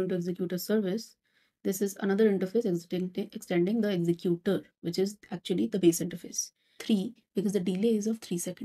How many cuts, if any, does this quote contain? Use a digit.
1